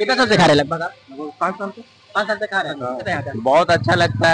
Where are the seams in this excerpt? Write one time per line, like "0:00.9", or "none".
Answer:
0:03.1